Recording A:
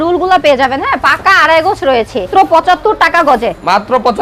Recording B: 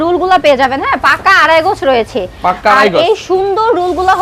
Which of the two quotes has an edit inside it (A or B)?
A